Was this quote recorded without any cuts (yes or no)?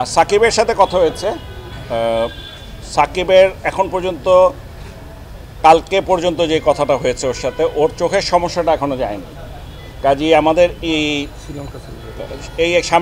yes